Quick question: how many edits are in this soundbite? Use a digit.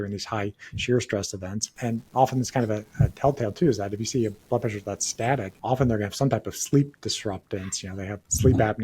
2